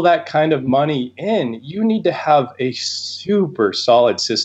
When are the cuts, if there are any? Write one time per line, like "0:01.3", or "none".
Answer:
none